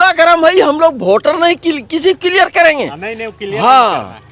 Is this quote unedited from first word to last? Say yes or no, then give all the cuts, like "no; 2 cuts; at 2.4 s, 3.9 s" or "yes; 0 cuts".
yes; 0 cuts